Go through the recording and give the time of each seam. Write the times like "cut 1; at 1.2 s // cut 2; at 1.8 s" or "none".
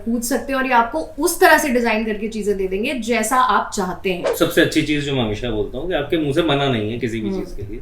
cut 1; at 4.3 s